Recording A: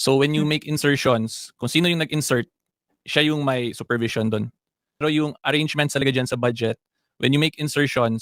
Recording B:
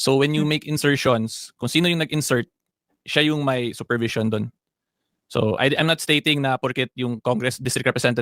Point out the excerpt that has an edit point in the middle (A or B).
A